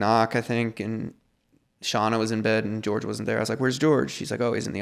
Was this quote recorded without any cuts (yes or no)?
yes